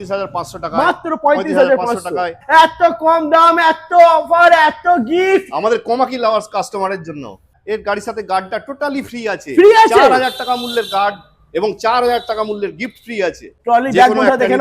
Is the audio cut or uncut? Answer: cut